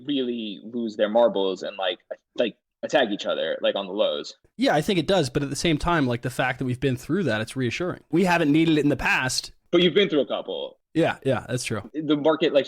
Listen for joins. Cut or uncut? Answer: cut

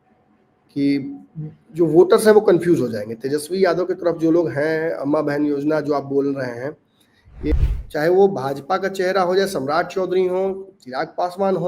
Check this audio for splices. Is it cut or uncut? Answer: cut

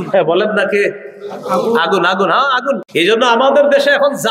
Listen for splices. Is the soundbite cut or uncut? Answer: cut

